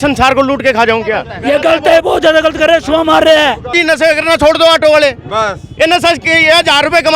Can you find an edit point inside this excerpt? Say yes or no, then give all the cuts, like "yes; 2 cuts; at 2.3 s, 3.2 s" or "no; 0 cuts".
yes; 2 cuts; at 1.3 s, 3.8 s